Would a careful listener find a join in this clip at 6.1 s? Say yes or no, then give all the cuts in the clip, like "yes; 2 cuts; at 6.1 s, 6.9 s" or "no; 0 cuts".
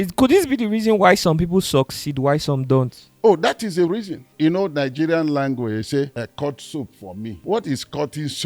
yes; 3 cuts; at 4.3 s, 6.1 s, 7.4 s